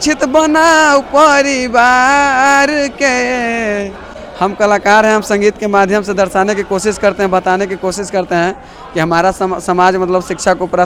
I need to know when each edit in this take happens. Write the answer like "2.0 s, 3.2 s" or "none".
none